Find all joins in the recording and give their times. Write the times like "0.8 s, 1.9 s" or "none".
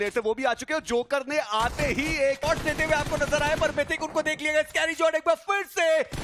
2.4 s

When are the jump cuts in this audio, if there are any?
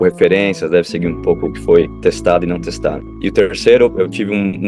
1.9 s, 3.1 s

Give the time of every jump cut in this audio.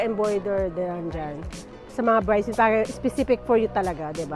none

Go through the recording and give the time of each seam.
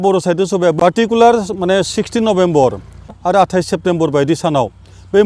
0.9 s, 3.2 s

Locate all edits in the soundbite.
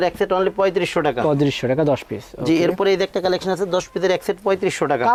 none

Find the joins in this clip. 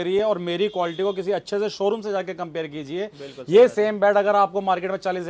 none

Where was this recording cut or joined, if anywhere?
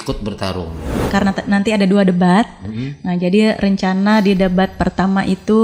1.0 s

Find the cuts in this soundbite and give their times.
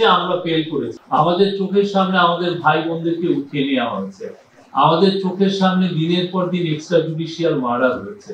1.0 s

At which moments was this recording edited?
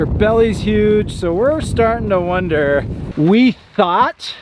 3.0 s

